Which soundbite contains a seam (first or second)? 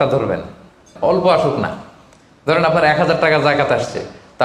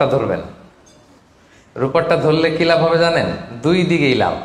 first